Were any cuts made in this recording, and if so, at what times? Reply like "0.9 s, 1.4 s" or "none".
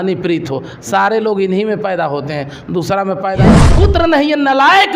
3.5 s